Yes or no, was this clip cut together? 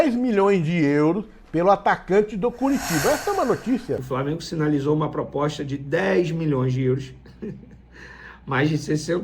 yes